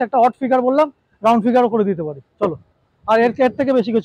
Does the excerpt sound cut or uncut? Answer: uncut